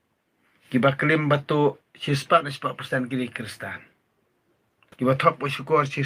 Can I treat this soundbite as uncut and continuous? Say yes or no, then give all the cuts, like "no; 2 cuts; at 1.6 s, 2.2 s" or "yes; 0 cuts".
yes; 0 cuts